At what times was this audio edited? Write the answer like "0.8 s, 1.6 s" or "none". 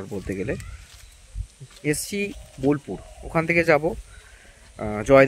none